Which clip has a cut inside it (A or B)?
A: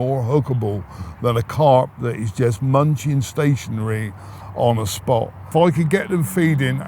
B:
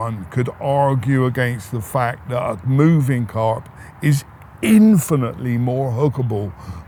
A